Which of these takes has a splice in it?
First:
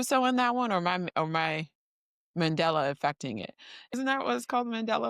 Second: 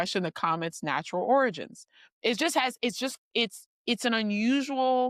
first; 1 cut; at 3.9 s

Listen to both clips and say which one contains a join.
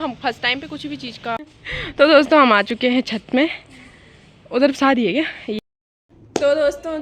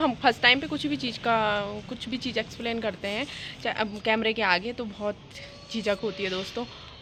first; 2 cuts; at 1.4 s, 5.6 s

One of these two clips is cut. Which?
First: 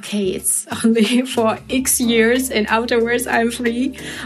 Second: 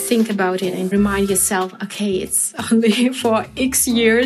second; 1 cut; at 0.9 s

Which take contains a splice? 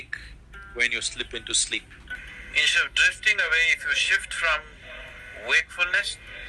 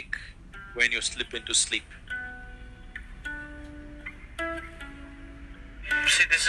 first; 1 cut; at 2.1 s

